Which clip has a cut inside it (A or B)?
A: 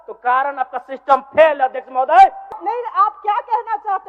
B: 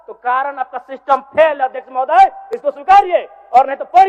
A